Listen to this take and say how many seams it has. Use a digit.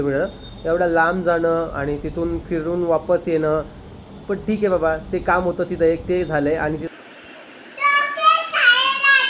1